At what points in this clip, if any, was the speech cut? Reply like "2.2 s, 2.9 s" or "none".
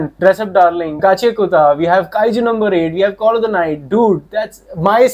1.0 s